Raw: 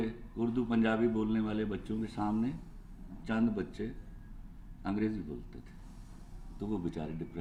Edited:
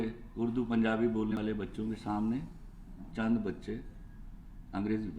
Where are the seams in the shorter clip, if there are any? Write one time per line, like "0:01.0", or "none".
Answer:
0:01.3